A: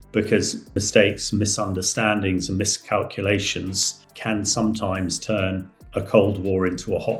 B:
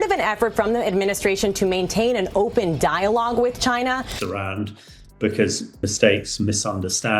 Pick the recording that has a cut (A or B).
B